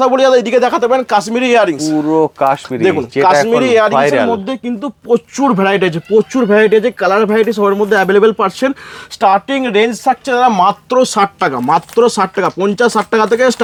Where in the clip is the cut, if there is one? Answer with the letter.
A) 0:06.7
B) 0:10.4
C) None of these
C